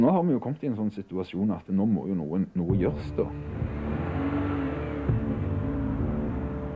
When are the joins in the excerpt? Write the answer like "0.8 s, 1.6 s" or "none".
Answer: none